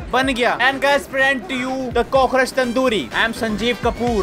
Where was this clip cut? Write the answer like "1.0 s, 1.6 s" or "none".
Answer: none